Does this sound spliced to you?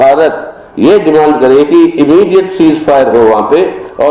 no; 0 cuts

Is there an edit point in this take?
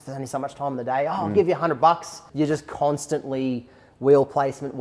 yes; 1 cut; at 2.2 s

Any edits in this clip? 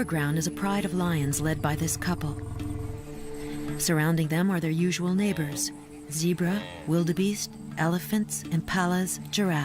yes; 1 cut; at 6.5 s

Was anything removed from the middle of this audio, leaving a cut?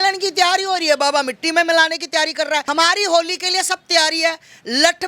yes; 1 cut; at 2.7 s

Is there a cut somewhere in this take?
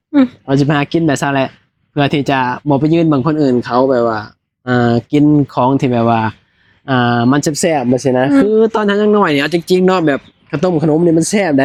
no; 0 cuts

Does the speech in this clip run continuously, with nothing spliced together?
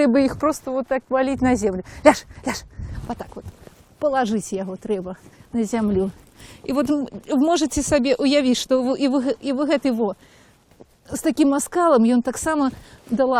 no; 1 cut; at 3.5 s

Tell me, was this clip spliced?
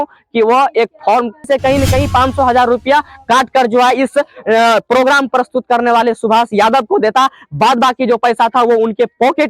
yes; 1 cut; at 1.4 s

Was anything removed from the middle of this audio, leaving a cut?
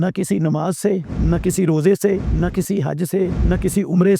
yes; 3 cuts; at 1.1 s, 2.3 s, 3.4 s

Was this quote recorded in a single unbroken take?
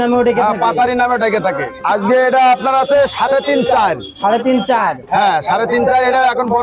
no; 1 cut; at 1.8 s

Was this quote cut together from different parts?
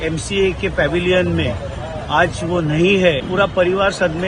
yes; 1 cut; at 3.2 s

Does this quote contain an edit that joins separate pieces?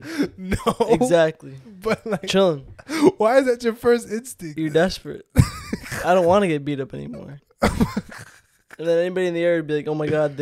yes; 2 cuts; at 4.5 s, 7.4 s

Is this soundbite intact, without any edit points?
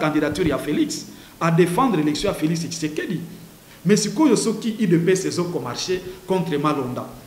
yes; 0 cuts

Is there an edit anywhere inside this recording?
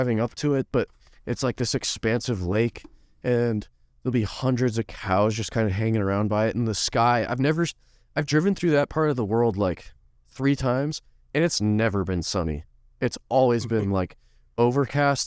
no; 0 cuts

